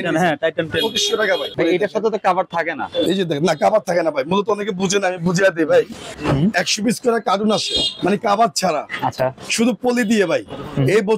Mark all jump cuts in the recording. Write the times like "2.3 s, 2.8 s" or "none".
1.5 s, 6.1 s